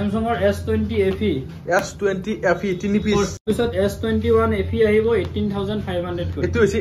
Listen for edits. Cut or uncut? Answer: cut